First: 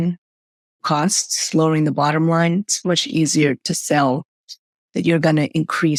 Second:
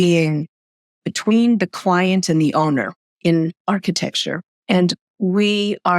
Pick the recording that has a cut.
second; 1 cut; at 1.0 s

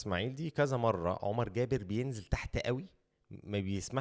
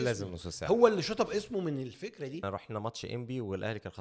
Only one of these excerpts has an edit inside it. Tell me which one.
second; 1 cut; at 2.4 s

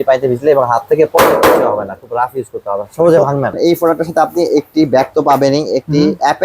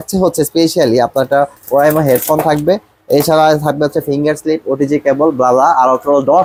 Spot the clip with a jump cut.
first; 1 cut; at 3.6 s

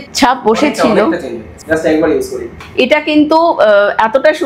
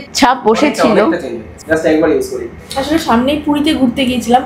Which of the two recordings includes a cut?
first; 1 cut; at 2.6 s

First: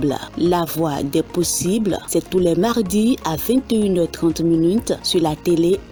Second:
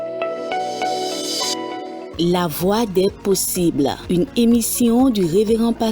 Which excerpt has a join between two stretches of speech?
second; 1 cut; at 1.6 s

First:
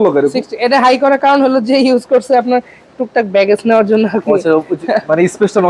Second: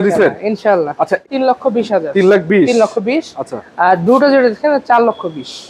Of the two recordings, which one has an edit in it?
second; 1 cut; at 1.2 s

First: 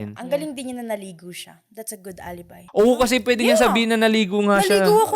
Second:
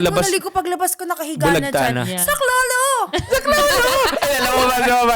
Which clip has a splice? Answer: first; 1 cut; at 2.6 s

